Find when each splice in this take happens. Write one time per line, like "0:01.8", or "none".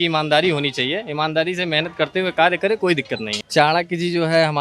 0:03.3